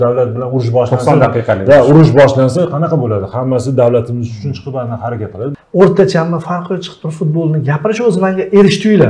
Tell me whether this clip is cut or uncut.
cut